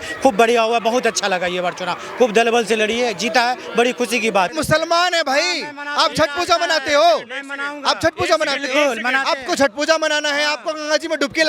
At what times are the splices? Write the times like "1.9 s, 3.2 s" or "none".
4.5 s